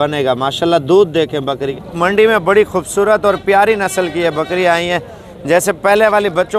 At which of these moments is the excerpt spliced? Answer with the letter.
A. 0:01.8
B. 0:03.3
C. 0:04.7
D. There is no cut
A